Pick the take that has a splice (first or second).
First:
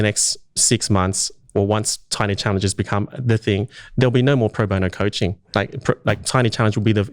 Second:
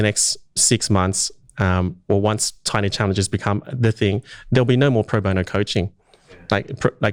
first